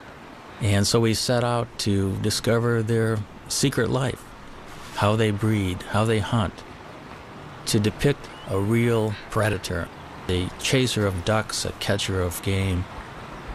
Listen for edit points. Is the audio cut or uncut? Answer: cut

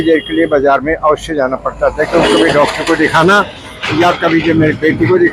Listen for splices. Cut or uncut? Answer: uncut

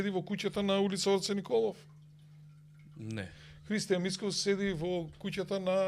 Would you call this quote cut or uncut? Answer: uncut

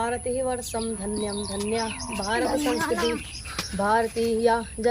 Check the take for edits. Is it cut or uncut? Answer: uncut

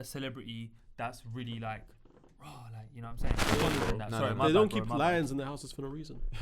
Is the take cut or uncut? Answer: cut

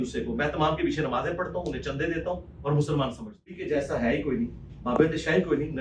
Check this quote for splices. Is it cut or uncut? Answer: cut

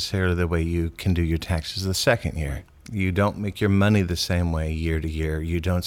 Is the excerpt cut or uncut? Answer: uncut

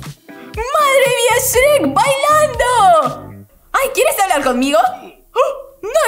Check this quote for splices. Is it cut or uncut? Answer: cut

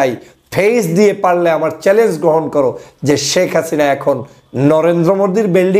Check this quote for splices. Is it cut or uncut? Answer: uncut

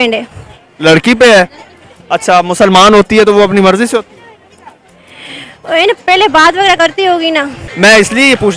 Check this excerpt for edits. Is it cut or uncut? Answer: cut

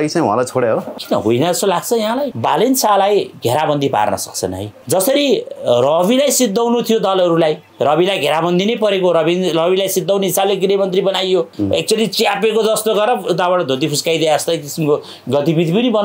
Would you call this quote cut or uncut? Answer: cut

